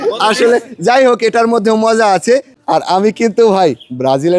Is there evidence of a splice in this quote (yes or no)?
yes